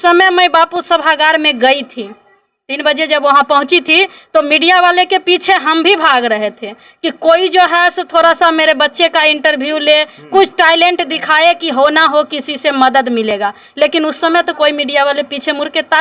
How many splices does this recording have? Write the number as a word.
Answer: zero